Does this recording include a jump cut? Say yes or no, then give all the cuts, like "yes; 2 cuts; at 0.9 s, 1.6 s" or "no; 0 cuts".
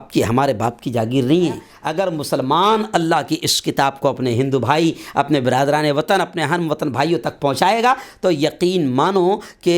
yes; 1 cut; at 1.8 s